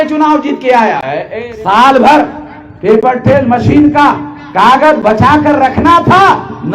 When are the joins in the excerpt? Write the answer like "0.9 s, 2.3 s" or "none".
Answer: 1.4 s